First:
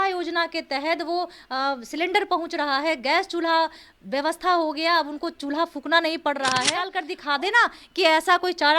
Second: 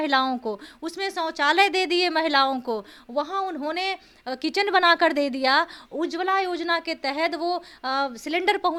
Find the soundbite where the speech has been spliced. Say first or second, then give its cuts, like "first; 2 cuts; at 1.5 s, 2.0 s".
first; 1 cut; at 7.1 s